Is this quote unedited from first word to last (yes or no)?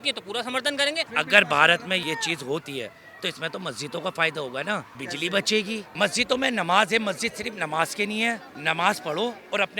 no